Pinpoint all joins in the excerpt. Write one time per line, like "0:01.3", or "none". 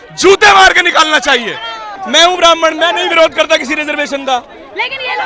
0:01.9